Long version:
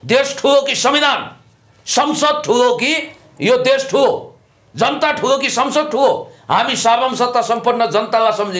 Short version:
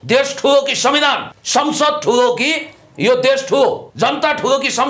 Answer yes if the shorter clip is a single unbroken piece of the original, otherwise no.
no